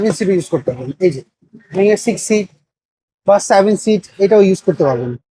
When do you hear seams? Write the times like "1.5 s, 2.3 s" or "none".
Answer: none